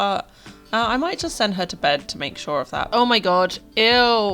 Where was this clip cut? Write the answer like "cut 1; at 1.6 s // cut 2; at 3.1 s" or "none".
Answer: cut 1; at 2.8 s

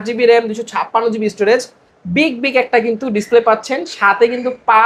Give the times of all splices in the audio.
none

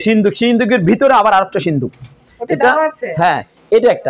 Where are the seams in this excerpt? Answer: none

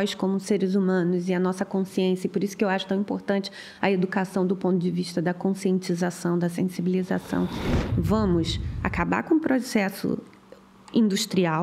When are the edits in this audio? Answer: cut 1; at 7.8 s

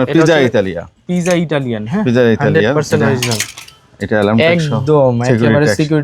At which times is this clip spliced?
none

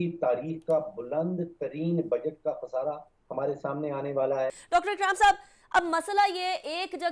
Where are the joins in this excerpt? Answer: cut 1; at 4.6 s

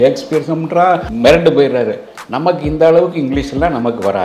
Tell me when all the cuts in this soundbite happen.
cut 1; at 1.1 s

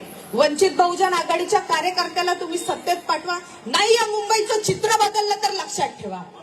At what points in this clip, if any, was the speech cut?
none

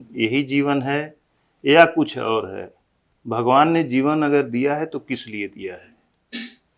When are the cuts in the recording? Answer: none

